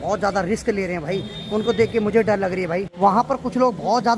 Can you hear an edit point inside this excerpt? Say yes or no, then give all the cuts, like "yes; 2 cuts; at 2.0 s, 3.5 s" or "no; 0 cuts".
yes; 1 cut; at 2.9 s